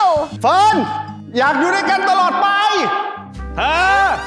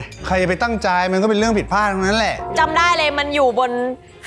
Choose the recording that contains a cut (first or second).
second